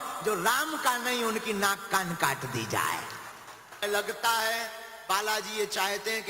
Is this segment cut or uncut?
cut